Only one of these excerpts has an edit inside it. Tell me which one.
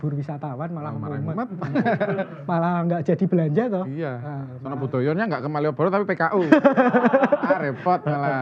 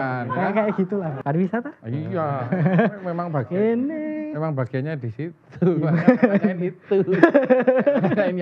second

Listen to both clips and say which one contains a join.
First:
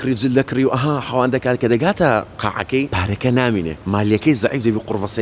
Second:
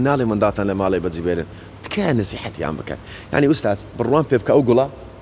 first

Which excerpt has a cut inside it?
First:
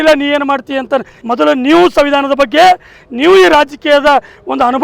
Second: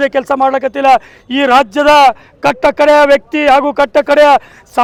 first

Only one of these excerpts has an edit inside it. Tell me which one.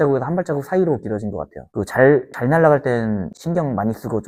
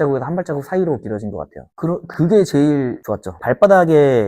second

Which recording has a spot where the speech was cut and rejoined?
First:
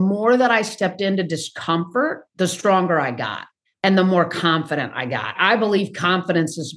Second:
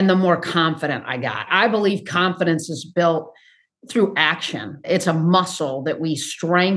first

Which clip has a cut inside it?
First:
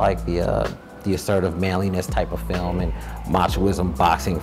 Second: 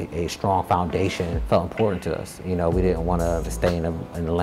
second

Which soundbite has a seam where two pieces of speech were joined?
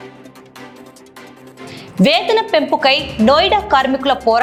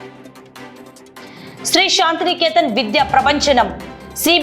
second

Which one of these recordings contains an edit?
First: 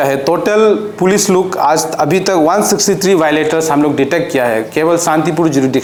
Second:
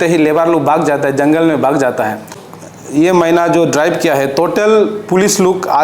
second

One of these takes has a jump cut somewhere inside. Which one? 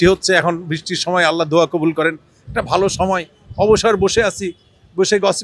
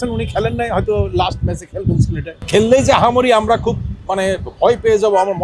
second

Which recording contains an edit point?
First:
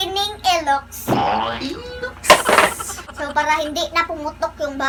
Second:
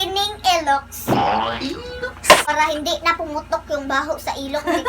second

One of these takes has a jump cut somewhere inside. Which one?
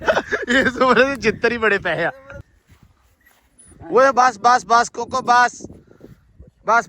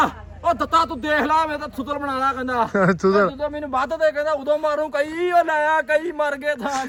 first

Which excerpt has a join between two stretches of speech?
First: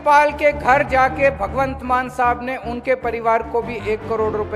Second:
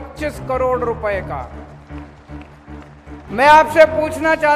second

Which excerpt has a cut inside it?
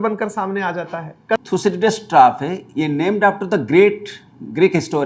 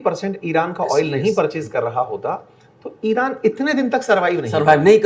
first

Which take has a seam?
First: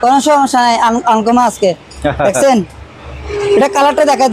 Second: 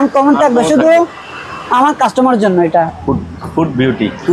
second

